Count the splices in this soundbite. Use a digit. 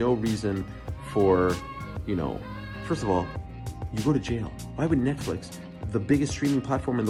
0